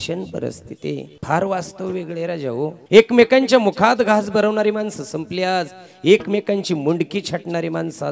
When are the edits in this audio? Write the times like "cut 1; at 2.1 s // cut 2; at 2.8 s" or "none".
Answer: cut 1; at 1.1 s // cut 2; at 2.8 s